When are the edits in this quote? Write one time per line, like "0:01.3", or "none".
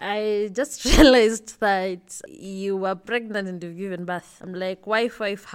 0:02.2
0:04.4